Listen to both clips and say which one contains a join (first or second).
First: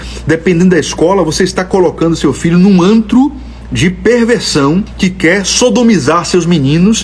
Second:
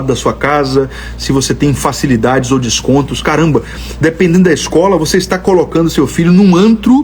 first